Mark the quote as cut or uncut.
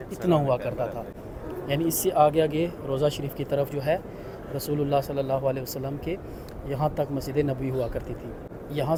uncut